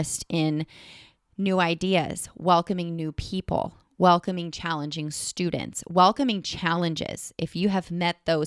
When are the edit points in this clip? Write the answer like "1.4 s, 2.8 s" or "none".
none